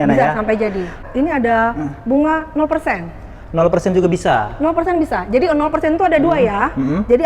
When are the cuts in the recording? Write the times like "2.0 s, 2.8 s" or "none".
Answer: 1.0 s